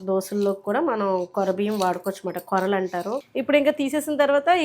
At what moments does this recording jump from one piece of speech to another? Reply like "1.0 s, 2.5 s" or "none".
3.2 s